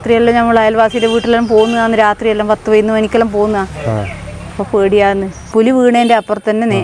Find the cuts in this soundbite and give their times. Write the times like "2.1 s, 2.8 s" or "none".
5.5 s